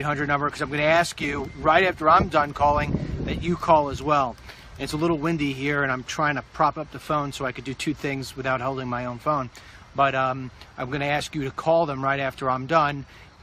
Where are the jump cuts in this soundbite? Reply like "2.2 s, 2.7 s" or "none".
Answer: 7.3 s